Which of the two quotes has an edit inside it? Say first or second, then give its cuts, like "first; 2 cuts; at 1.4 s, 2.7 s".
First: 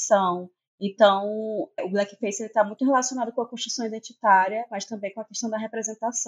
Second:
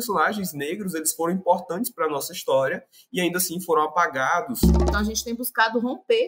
second; 1 cut; at 4.9 s